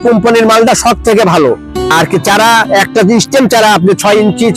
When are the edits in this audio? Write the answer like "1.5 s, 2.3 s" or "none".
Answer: 1.8 s